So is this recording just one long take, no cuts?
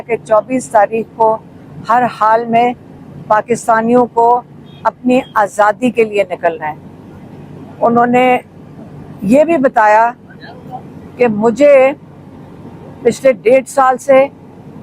yes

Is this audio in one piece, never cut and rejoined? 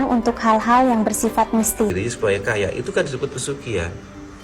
no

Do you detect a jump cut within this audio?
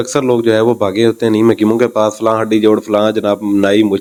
no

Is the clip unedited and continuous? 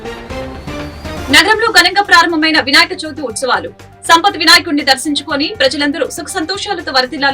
no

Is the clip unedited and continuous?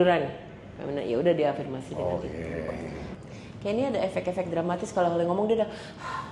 no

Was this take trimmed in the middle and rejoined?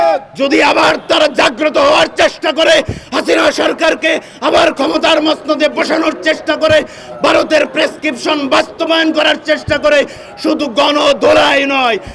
no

